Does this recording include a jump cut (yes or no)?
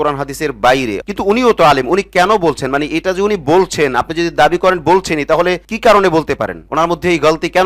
yes